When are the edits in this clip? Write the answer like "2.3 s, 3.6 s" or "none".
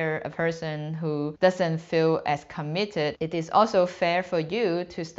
3.1 s